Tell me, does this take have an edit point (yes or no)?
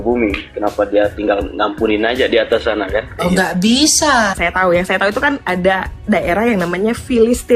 yes